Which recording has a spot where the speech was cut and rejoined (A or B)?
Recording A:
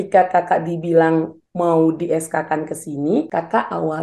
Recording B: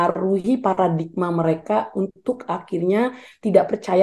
A